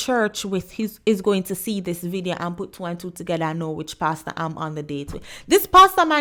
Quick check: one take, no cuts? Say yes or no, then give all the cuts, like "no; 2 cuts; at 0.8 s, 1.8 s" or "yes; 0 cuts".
yes; 0 cuts